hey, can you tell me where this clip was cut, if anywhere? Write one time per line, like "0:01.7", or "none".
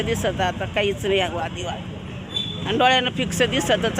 0:02.4

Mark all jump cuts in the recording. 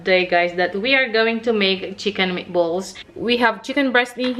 0:03.1

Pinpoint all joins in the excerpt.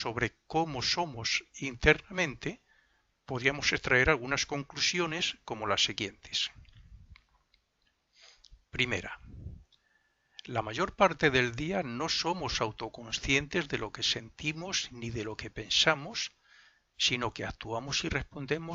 none

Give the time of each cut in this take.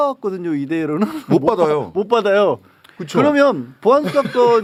none

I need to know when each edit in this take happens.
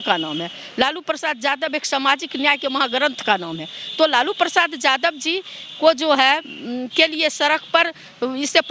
none

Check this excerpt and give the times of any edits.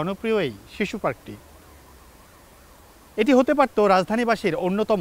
none

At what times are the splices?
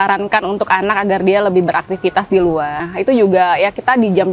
0:02.8

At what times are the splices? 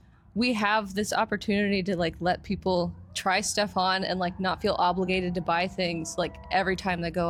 none

